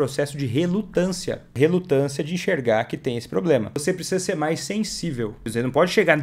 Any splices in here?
yes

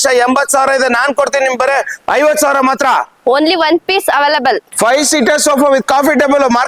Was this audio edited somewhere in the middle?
no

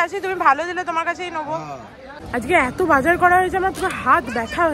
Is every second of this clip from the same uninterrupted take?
no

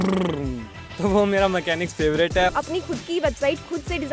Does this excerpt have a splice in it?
yes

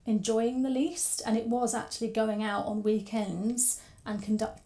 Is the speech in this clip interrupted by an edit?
no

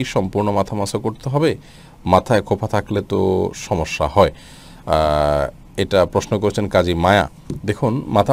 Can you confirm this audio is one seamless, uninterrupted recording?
yes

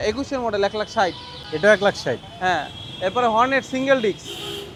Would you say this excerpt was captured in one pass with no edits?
yes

